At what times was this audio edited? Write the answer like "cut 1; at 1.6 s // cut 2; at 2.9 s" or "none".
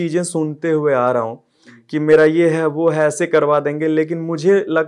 none